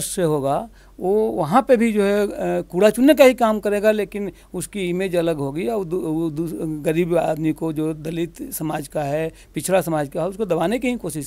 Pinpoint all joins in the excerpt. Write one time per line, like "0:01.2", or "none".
none